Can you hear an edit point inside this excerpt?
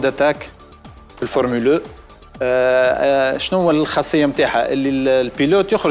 no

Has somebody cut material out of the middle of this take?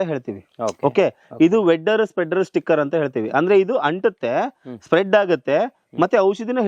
no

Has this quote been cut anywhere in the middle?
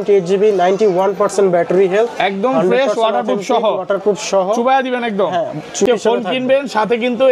yes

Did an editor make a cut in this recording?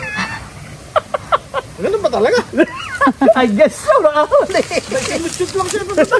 no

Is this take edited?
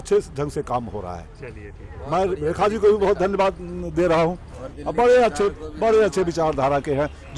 no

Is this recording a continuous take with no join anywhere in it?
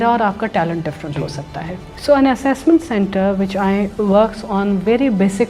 no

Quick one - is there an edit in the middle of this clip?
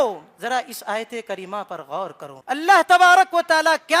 yes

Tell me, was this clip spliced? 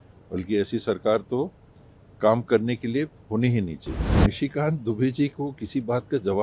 yes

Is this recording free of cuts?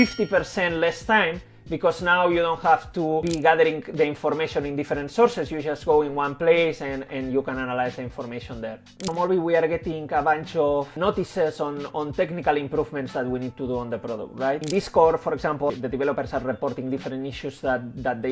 no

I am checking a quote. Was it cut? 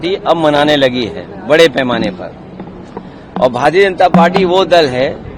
no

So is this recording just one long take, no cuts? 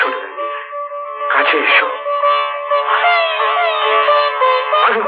yes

